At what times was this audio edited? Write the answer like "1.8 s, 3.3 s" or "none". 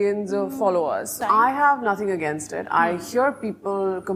1.1 s